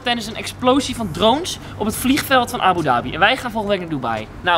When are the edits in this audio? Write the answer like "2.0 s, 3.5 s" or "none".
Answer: none